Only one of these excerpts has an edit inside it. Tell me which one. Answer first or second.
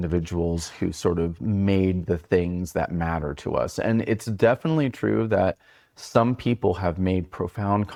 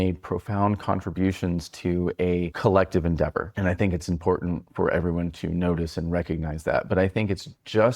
second